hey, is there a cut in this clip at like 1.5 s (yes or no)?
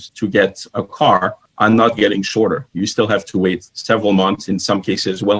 no